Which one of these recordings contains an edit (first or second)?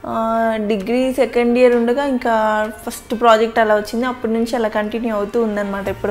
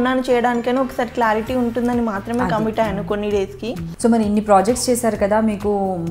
second